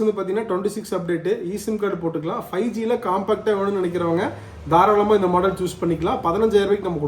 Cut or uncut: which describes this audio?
uncut